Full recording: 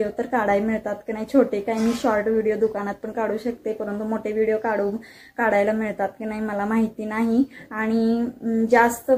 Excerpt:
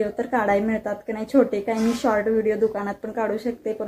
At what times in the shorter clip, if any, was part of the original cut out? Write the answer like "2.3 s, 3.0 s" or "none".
none